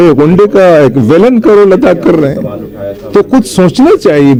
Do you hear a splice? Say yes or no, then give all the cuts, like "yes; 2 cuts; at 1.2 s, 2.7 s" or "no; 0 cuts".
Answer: no; 0 cuts